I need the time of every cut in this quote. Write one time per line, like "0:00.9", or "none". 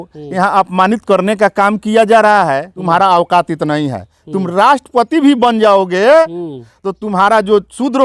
0:02.7

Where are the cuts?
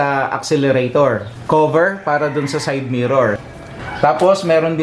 0:01.3

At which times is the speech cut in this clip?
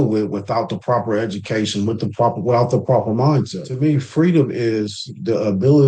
0:03.6

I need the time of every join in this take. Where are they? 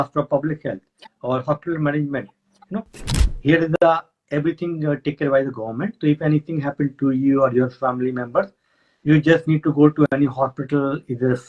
0:03.1

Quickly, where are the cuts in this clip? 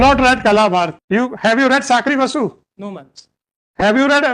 0:01.0

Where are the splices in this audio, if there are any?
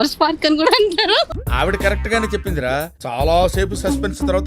0:01.3
0:03.0

